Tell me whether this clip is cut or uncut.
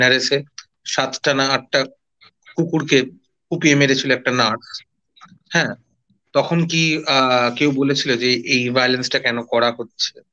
uncut